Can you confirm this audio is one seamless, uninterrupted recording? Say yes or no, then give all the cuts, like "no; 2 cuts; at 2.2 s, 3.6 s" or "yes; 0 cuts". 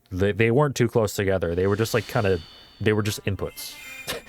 yes; 0 cuts